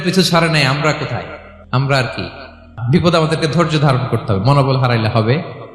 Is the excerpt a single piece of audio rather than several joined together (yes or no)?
yes